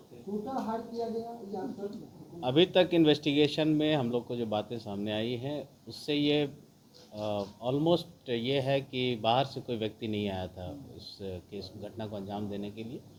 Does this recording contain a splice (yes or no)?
no